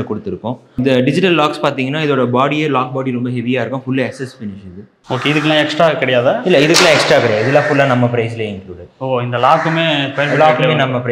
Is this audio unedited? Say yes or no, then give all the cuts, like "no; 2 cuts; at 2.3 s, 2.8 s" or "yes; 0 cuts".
yes; 0 cuts